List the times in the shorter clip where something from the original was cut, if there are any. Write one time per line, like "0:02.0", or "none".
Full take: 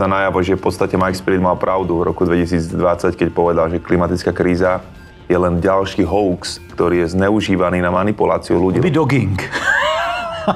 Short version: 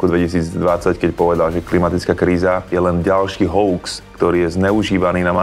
0:02.7